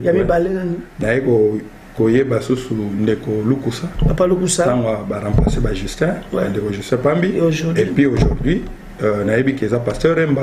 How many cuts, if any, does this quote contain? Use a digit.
0